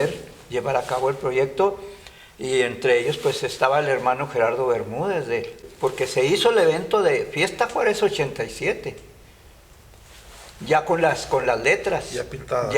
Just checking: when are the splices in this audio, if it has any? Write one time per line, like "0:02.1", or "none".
0:05.7